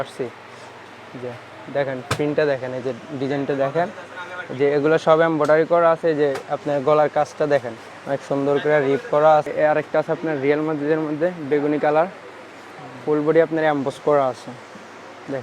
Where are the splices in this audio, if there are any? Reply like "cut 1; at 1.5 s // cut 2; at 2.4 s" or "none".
cut 1; at 9.5 s